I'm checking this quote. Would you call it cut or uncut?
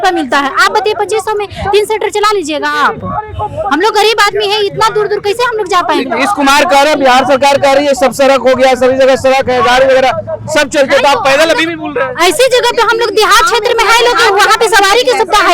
uncut